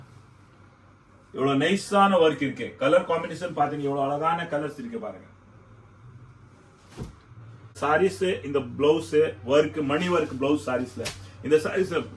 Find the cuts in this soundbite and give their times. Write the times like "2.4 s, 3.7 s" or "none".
7.8 s